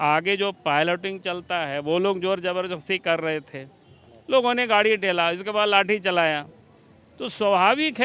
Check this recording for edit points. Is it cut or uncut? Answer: uncut